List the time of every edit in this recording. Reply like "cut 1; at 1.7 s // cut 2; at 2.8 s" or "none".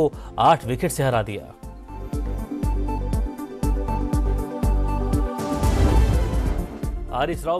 cut 1; at 6.3 s